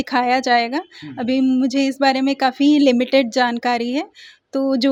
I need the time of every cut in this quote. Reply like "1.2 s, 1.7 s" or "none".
none